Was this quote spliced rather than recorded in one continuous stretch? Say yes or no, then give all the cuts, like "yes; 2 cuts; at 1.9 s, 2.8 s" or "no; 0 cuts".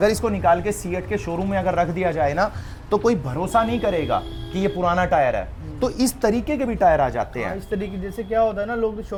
no; 0 cuts